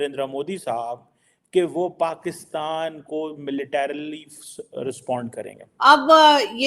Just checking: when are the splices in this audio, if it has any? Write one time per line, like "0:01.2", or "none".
0:05.6